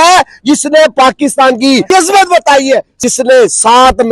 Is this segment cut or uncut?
cut